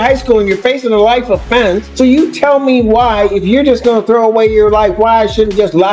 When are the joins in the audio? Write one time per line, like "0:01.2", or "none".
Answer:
0:01.9